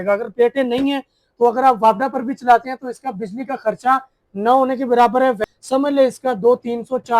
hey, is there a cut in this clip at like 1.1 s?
no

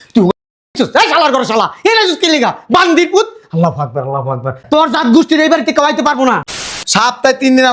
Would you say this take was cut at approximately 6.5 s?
yes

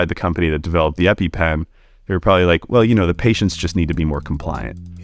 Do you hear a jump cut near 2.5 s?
no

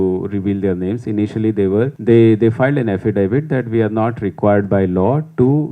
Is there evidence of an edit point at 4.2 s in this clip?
no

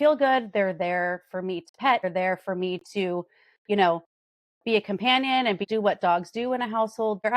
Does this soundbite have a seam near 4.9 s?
no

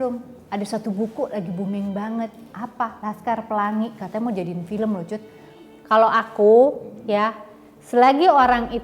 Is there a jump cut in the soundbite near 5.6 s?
yes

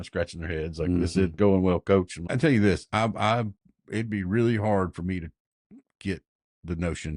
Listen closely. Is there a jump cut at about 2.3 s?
yes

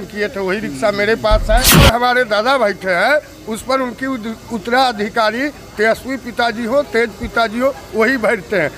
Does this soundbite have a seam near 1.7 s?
yes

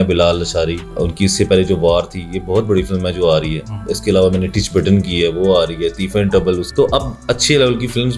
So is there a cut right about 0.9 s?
yes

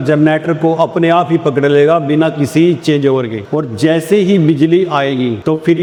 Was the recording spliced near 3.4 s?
no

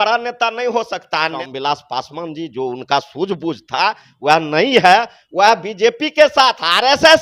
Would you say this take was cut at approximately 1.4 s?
yes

